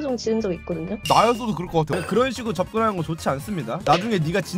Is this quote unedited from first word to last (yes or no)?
no